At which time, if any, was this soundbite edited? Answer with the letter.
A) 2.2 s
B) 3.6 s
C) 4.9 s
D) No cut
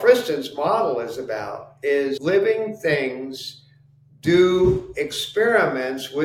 A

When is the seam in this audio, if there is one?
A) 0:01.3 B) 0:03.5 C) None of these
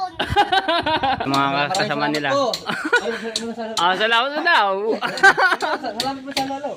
A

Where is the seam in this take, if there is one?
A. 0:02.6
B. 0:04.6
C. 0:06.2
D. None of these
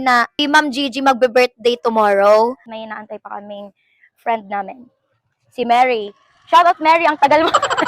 A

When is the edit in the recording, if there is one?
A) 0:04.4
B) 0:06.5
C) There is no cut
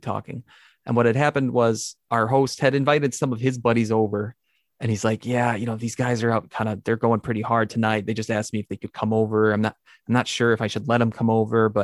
C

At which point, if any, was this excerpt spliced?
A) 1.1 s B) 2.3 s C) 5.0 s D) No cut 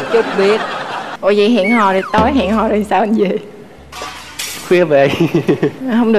A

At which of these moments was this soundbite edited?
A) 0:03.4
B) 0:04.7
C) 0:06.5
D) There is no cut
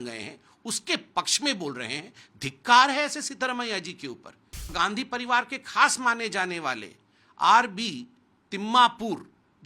B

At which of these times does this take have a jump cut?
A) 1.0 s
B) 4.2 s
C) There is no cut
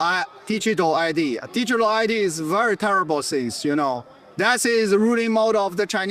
C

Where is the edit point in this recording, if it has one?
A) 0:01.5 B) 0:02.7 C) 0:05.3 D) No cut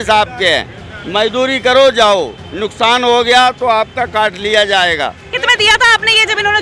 C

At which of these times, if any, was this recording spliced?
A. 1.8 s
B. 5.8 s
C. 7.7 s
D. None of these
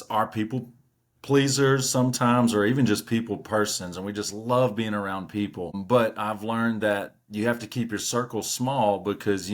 B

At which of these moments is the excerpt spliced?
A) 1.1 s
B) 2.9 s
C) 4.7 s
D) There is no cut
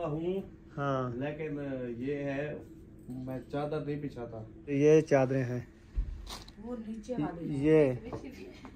C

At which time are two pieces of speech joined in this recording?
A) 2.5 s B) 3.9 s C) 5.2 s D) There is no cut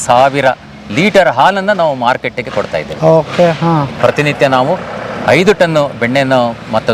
B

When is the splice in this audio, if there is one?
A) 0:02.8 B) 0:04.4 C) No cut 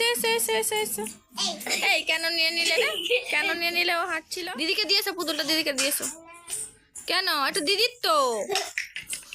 B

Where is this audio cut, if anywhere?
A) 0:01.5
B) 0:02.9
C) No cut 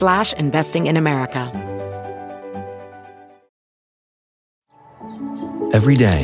A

